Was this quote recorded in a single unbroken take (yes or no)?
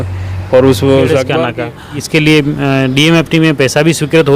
no